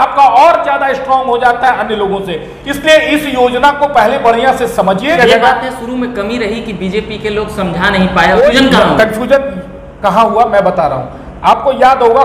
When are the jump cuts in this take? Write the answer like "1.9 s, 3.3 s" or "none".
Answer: 5.1 s, 8.4 s